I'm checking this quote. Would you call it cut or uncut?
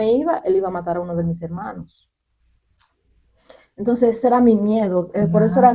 uncut